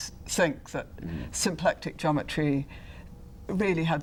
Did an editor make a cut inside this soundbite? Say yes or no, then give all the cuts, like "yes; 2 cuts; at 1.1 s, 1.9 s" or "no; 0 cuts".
no; 0 cuts